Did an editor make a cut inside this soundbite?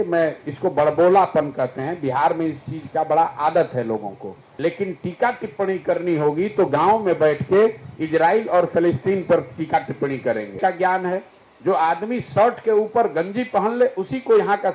yes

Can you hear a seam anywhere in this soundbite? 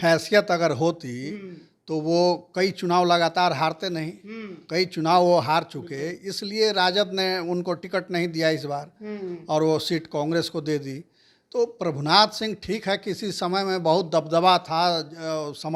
no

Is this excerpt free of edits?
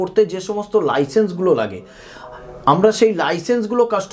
yes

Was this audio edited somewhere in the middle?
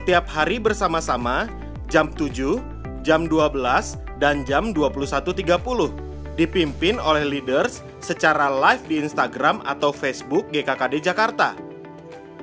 yes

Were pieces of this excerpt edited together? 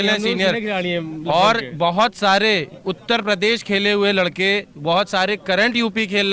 no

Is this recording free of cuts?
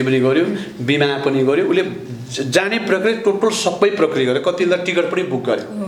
yes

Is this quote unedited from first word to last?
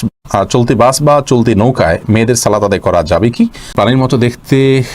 no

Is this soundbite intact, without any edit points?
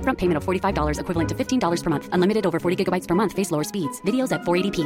yes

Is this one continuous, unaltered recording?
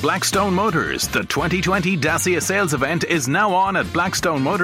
yes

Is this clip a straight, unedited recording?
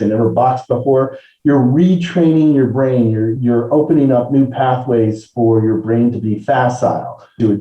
no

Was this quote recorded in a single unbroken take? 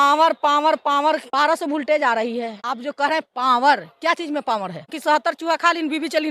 no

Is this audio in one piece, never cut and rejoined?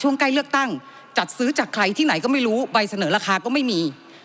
yes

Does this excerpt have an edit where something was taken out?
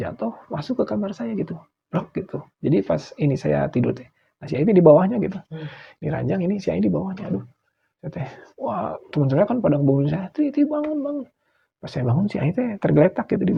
no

